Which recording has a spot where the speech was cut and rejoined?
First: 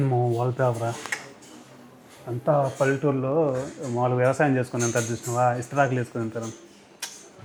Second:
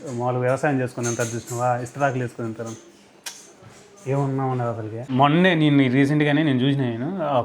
second; 1 cut; at 4.9 s

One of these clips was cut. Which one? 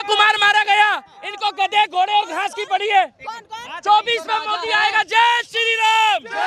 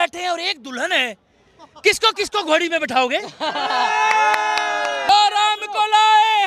second; 1 cut; at 5.1 s

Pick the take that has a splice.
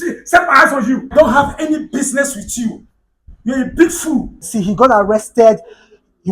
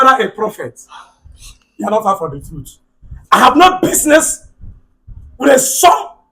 first; 2 cuts; at 1.1 s, 4.4 s

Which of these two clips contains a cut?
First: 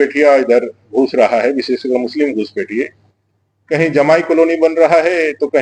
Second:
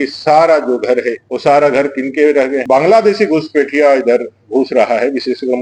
second; 2 cuts; at 1.2 s, 2.6 s

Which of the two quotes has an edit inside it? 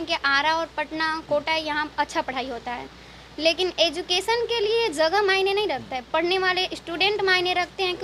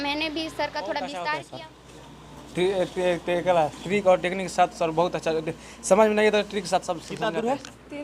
second; 2 cuts; at 1.4 s, 7.1 s

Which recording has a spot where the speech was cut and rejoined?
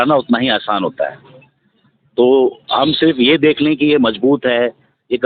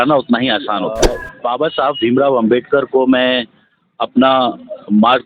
second; 1 cut; at 1.3 s

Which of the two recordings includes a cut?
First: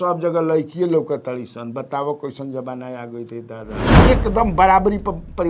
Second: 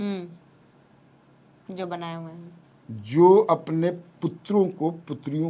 first; 1 cut; at 4.0 s

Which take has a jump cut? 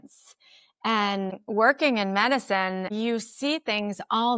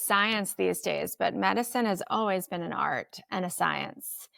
first; 2 cuts; at 1.4 s, 2.9 s

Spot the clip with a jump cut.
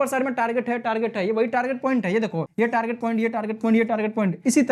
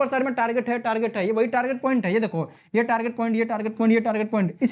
first; 1 cut; at 2.5 s

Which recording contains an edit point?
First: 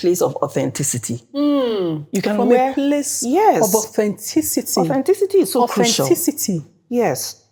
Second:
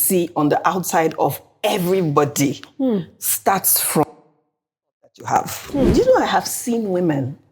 second; 1 cut; at 5.9 s

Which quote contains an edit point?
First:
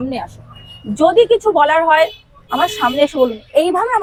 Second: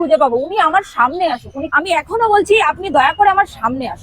second; 1 cut; at 1.7 s

